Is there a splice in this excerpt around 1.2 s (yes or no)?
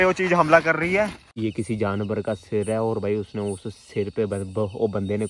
yes